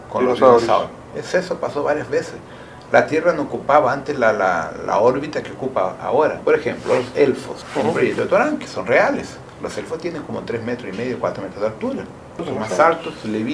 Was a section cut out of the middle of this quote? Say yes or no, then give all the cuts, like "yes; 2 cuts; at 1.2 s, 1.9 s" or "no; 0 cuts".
yes; 4 cuts; at 6.4 s, 7.6 s, 9.4 s, 12.5 s